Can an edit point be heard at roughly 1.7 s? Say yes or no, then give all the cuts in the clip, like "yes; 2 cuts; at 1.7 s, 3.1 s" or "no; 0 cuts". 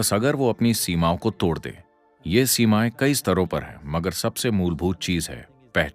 no; 0 cuts